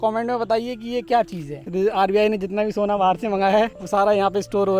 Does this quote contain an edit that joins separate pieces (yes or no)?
yes